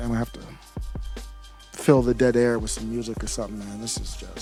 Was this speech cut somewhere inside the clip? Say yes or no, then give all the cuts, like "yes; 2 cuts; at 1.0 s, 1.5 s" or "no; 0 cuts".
no; 0 cuts